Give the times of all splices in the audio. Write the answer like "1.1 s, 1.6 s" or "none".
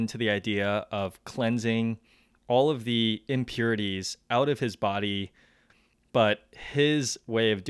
5.6 s